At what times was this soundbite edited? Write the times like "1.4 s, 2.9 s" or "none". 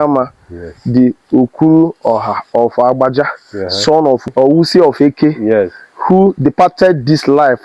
4.2 s